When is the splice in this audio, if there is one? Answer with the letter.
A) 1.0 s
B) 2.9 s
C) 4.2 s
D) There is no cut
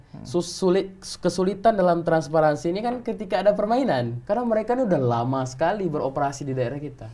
C